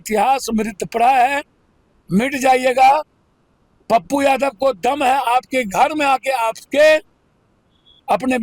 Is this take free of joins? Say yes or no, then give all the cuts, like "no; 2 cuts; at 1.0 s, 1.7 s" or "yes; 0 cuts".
yes; 0 cuts